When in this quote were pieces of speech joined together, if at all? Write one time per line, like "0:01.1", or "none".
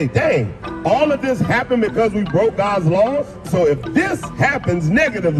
0:03.5